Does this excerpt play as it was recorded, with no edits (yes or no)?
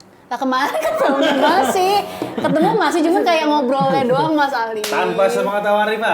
yes